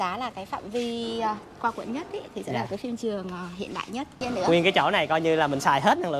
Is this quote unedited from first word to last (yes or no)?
no